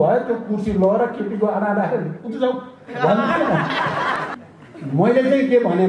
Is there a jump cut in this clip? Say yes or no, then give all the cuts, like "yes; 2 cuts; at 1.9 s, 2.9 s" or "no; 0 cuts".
yes; 1 cut; at 4.3 s